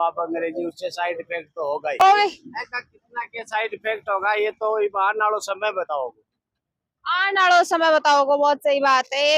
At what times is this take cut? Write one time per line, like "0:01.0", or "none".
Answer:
none